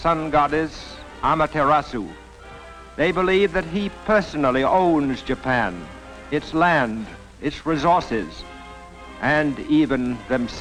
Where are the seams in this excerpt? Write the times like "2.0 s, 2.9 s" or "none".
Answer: none